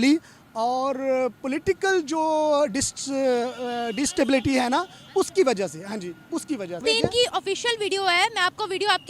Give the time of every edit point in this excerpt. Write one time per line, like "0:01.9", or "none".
0:06.8